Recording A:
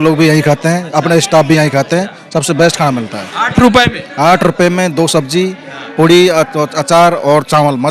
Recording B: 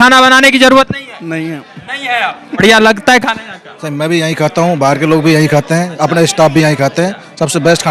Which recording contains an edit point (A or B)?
B